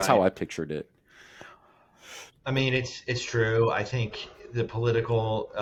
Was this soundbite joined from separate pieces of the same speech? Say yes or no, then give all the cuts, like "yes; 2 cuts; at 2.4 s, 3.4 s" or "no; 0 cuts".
no; 0 cuts